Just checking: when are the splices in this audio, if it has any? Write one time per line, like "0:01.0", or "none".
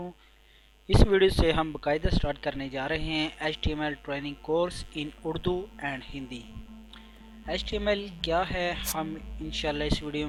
none